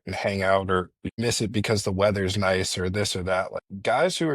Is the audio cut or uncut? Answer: cut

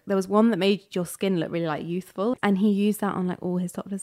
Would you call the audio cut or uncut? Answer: cut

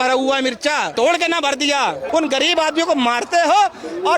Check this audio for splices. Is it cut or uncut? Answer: cut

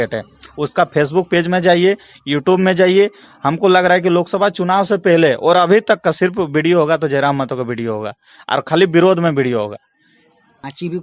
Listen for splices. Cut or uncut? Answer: uncut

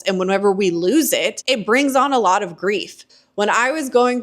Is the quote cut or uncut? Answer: cut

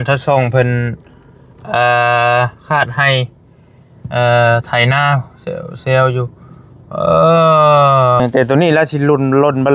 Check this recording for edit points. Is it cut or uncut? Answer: cut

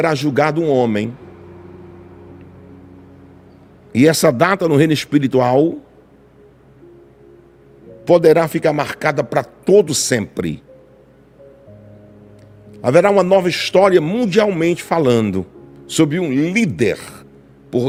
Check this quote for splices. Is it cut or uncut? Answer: uncut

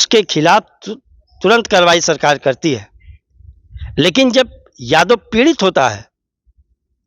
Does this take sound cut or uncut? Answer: uncut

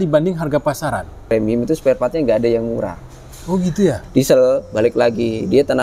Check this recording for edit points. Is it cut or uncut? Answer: cut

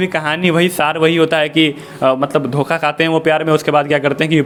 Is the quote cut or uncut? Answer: uncut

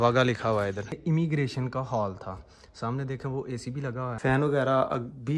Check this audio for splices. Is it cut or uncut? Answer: cut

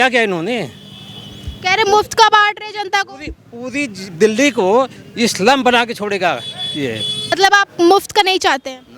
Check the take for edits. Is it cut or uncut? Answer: cut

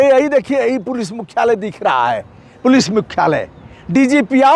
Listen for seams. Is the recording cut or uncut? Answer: uncut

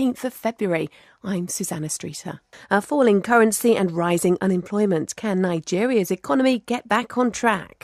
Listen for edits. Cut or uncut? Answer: uncut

